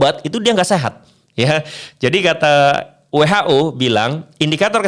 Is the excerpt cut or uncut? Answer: uncut